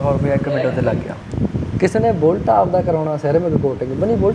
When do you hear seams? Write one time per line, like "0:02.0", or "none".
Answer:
0:01.1